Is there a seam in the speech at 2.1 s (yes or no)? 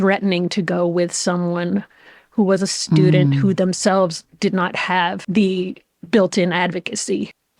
no